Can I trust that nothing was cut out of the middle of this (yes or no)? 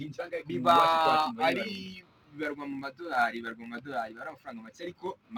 yes